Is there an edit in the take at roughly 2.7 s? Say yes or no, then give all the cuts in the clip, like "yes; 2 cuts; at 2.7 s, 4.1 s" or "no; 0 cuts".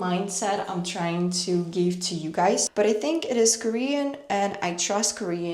yes; 1 cut; at 2.7 s